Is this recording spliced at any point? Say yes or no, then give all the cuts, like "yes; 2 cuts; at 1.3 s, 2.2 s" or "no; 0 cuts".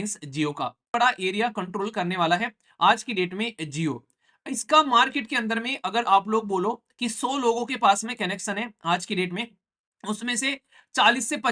yes; 1 cut; at 0.9 s